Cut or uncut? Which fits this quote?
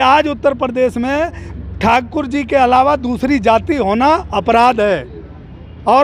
uncut